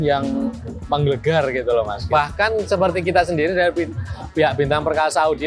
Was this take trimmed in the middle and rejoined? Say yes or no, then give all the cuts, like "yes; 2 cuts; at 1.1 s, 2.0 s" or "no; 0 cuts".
yes; 1 cut; at 2.0 s